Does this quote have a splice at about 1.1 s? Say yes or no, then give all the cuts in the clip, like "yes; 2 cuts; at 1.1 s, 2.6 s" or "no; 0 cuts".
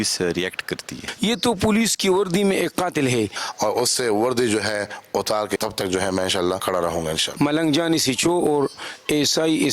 yes; 4 cuts; at 1.1 s, 3.4 s, 5.6 s, 7.0 s